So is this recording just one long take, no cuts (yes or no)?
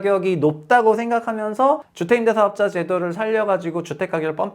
no